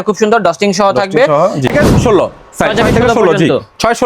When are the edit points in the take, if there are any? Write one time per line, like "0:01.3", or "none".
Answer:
0:01.7